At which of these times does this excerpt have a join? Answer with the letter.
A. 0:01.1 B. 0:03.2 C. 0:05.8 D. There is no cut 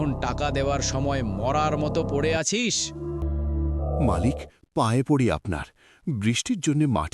B